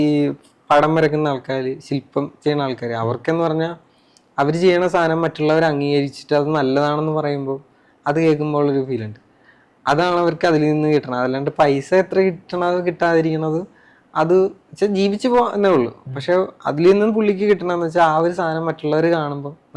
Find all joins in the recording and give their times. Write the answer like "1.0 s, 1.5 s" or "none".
none